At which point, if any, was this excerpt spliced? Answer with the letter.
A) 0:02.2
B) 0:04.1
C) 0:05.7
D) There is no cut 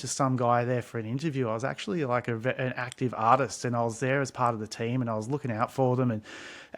D